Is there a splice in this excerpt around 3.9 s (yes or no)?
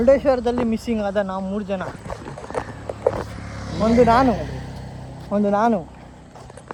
no